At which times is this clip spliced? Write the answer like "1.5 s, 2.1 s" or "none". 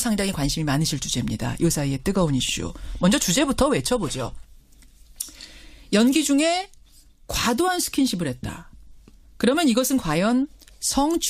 1.7 s